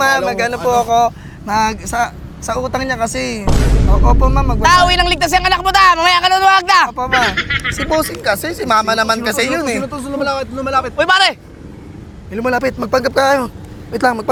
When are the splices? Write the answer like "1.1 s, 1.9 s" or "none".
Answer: none